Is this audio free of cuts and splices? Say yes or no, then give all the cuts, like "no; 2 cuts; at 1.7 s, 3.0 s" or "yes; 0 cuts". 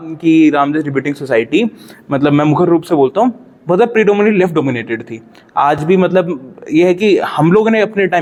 yes; 0 cuts